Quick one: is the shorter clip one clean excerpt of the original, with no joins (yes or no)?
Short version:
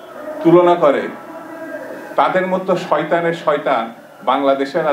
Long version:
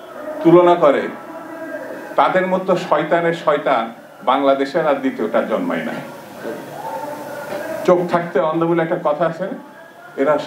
yes